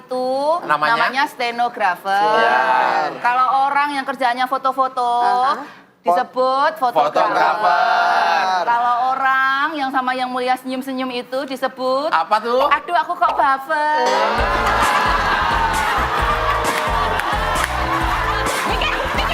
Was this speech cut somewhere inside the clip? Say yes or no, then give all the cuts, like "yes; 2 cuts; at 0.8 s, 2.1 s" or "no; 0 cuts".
no; 0 cuts